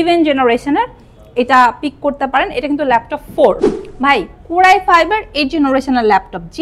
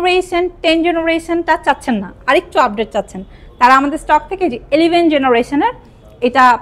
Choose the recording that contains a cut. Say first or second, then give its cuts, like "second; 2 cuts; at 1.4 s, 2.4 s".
first; 1 cut; at 3.7 s